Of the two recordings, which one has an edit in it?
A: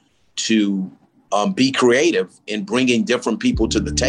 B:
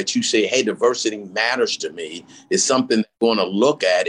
B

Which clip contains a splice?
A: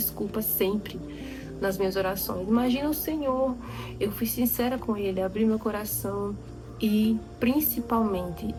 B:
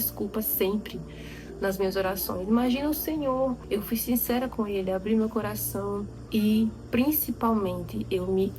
B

